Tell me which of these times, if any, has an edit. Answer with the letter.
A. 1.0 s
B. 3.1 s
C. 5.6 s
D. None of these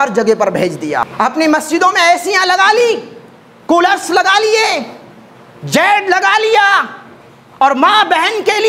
A